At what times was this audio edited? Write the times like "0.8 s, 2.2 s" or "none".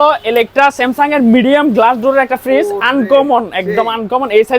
none